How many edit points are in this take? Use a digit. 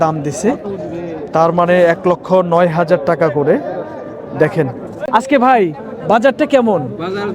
1